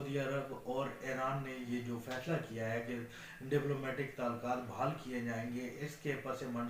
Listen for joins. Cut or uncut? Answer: uncut